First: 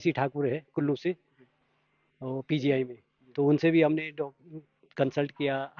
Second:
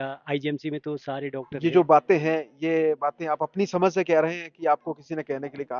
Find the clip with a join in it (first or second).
second